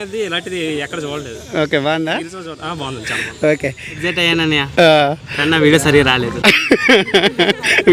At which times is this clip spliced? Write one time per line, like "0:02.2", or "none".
0:03.9